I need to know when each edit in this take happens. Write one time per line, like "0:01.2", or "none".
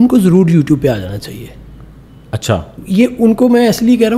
0:02.8